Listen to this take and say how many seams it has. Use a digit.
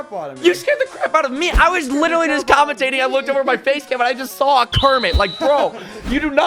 0